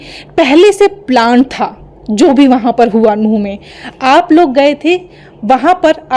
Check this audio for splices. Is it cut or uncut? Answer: uncut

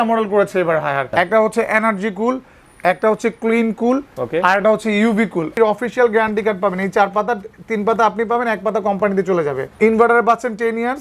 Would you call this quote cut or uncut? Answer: cut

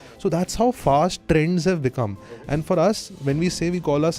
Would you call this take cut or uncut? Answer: cut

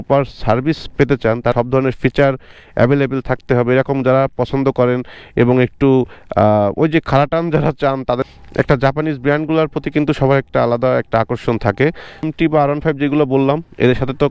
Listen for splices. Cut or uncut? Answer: cut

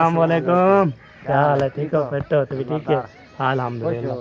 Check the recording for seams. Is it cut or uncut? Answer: uncut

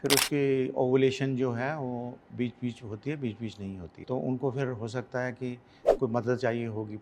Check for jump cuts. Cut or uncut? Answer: cut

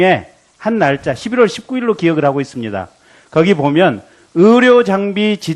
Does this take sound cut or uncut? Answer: uncut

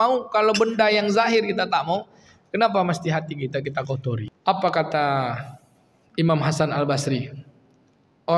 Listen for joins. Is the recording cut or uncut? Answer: cut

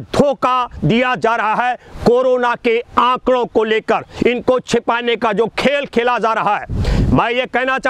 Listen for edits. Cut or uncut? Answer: uncut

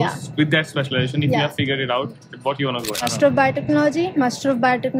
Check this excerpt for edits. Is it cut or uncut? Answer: cut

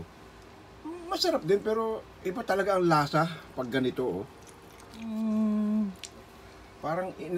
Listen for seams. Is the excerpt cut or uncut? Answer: cut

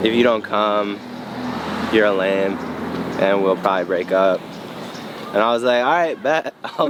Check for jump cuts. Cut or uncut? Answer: uncut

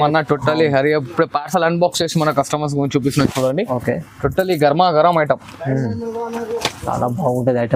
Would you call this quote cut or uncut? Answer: uncut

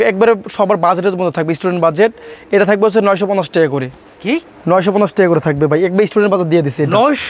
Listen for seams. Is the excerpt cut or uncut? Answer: uncut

